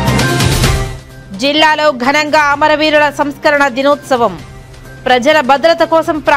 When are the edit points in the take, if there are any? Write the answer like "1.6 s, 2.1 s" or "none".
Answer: 1.0 s